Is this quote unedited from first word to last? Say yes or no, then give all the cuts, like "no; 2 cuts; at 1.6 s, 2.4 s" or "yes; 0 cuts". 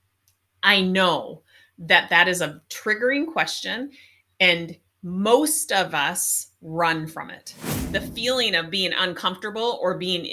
no; 1 cut; at 7.7 s